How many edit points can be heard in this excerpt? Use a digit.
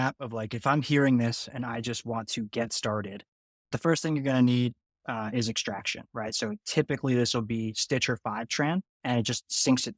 2